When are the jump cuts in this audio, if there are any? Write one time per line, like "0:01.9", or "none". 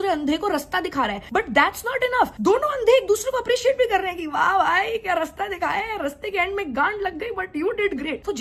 none

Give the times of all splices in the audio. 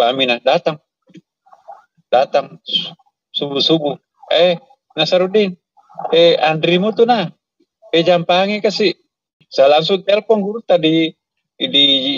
0:09.4

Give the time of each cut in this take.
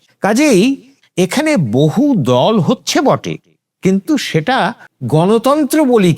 0:04.9

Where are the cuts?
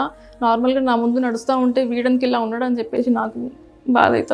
none

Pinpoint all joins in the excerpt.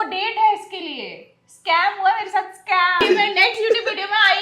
0:03.0

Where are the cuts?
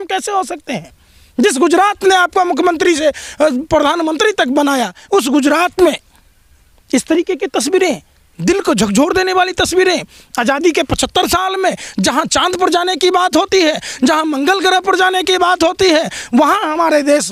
none

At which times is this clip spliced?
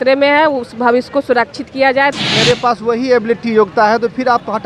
0:02.1

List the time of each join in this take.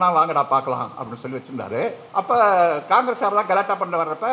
0:02.0

